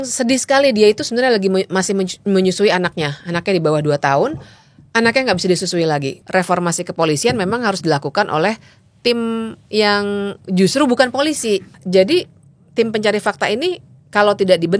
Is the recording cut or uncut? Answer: cut